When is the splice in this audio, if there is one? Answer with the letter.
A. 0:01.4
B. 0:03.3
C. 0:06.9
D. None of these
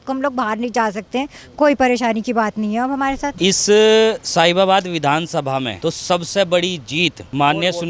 B